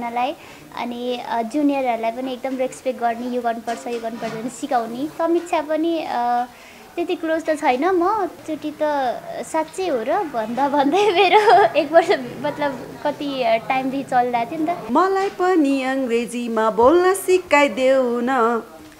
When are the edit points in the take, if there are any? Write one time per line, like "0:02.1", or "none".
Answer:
0:05.1
0:08.4
0:14.8